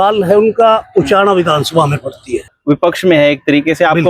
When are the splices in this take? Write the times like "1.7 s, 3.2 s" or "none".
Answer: 2.5 s